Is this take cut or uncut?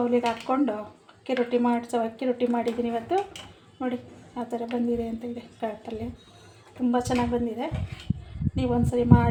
uncut